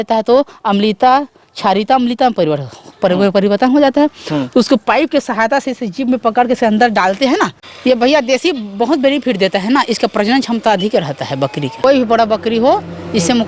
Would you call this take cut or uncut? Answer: cut